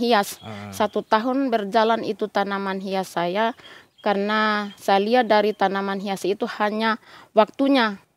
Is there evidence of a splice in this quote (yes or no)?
no